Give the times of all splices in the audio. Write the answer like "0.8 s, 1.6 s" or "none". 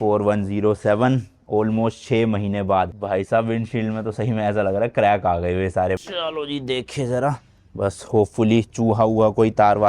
3.0 s, 6.0 s